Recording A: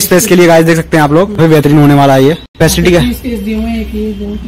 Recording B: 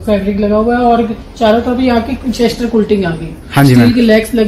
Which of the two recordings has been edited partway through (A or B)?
A